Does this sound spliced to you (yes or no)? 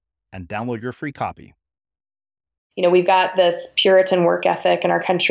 yes